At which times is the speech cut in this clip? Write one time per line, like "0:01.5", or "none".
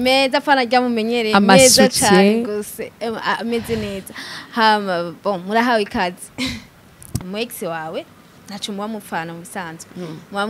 0:07.2